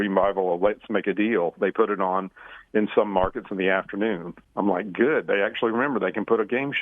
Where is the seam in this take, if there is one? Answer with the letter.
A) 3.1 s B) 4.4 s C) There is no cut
B